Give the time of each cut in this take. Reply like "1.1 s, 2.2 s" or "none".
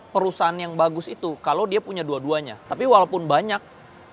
2.6 s